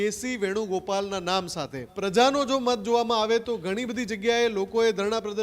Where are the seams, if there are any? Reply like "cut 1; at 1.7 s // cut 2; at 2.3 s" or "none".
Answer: cut 1; at 1.9 s